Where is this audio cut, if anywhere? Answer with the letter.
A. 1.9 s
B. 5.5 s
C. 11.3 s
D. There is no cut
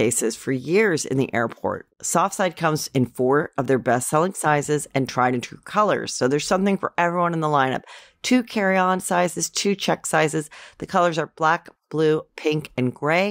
A